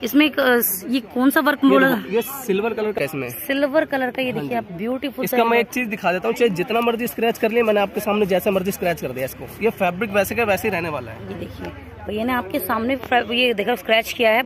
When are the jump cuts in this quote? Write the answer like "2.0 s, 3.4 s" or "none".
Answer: none